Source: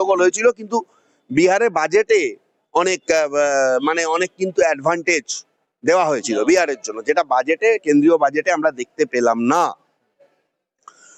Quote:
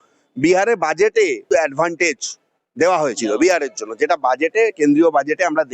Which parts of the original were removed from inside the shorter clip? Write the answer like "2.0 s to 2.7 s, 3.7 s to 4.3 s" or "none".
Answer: 2.4 s to 4.5 s